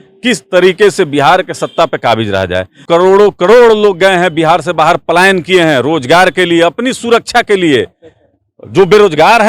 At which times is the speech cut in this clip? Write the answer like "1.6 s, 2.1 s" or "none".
2.8 s